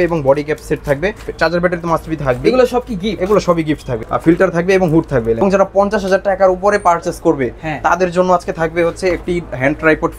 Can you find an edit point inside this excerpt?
yes; 3 cuts; at 1.3 s, 3.9 s, 5.4 s

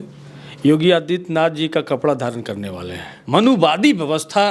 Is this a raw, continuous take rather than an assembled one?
no; 1 cut; at 3.1 s

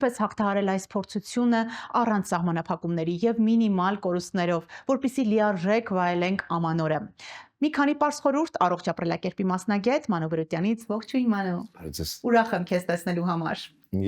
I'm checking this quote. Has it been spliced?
no; 0 cuts

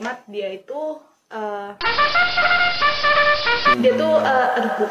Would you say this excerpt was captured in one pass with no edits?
yes; 0 cuts

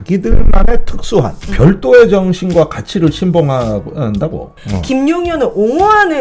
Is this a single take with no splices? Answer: no; 1 cut; at 4.6 s

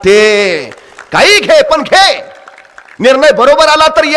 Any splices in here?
no; 0 cuts

